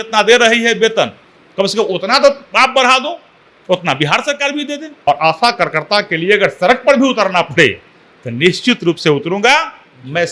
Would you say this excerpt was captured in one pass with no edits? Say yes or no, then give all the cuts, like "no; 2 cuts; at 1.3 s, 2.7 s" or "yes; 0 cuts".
no; 1 cut; at 4.9 s